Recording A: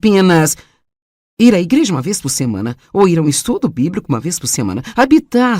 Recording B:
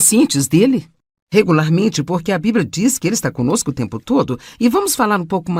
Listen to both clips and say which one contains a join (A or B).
A